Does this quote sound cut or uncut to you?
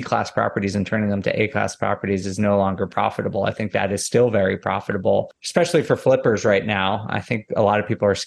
cut